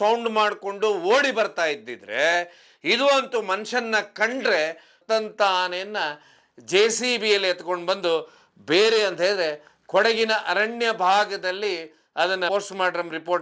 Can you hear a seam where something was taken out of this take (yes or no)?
yes